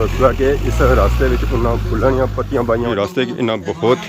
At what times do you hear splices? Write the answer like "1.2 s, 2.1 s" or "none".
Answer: 2.9 s